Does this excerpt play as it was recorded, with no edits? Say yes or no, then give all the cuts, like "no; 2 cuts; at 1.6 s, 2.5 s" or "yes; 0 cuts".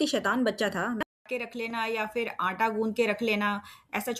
no; 1 cut; at 1.0 s